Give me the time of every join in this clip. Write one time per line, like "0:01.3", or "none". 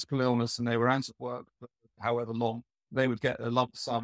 0:02.7